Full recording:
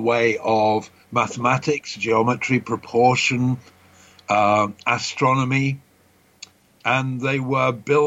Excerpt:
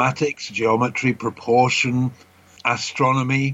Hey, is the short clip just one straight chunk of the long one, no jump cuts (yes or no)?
no